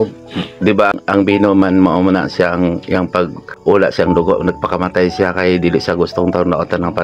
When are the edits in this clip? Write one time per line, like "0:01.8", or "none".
0:01.0
0:03.5